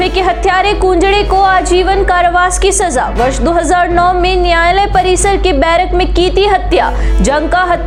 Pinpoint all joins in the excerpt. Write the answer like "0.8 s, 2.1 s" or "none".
none